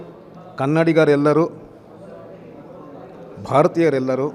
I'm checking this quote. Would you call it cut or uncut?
uncut